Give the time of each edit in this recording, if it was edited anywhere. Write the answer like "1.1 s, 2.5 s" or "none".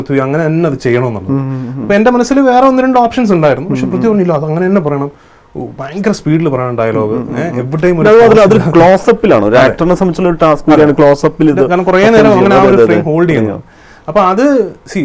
none